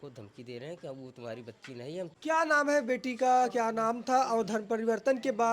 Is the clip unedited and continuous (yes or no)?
no